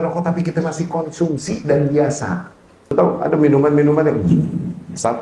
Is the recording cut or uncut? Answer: cut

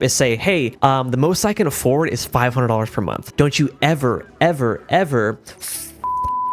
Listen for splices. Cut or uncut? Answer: uncut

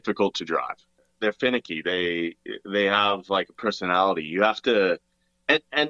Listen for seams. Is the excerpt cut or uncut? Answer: cut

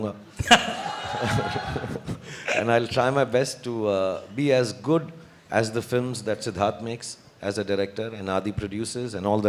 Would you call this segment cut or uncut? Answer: uncut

